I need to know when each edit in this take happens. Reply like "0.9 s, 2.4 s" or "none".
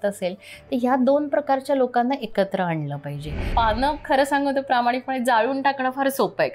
3.5 s